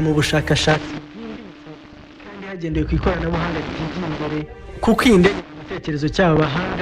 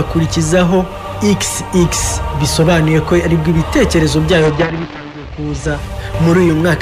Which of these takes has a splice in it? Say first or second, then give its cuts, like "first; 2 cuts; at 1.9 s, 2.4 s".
first; 1 cut; at 2.1 s